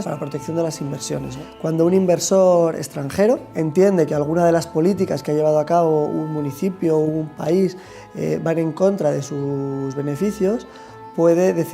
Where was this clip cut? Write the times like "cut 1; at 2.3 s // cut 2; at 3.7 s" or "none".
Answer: cut 1; at 7.0 s